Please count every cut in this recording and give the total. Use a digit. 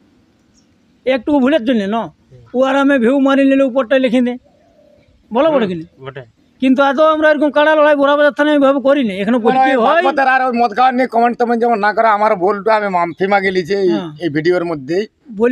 1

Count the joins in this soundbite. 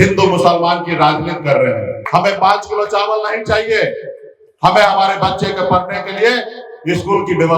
1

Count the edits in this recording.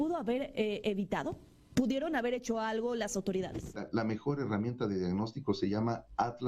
1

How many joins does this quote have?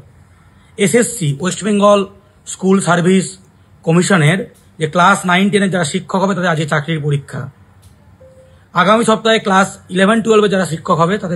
1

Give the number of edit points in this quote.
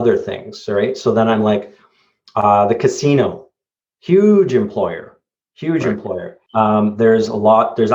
1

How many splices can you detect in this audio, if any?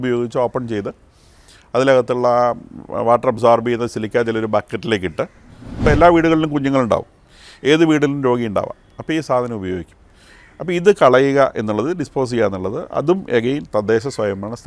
1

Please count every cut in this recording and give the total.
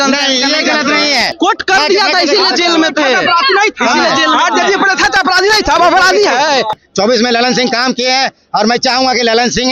2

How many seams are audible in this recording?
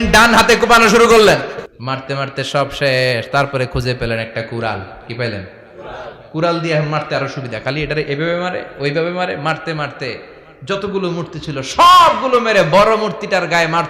1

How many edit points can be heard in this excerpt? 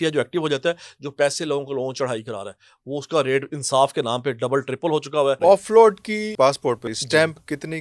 2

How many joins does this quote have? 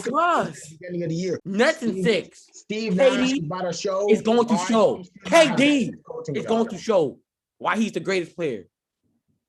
1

